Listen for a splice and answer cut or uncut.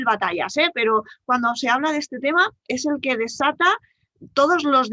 uncut